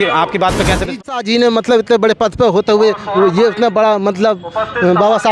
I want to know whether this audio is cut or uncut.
cut